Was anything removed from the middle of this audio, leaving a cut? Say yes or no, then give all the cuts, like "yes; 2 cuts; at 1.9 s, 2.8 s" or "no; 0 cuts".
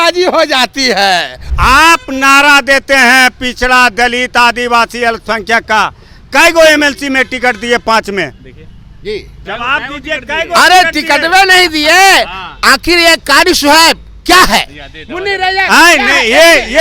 yes; 1 cut; at 1.4 s